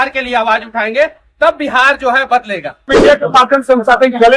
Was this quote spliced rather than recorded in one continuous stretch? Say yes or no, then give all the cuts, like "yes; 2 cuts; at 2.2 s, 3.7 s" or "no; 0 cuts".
yes; 1 cut; at 2.9 s